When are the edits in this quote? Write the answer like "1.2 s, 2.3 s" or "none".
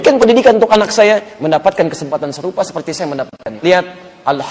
3.5 s